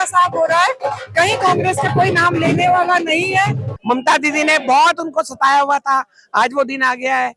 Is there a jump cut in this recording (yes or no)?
yes